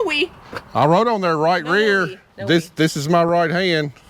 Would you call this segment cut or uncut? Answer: uncut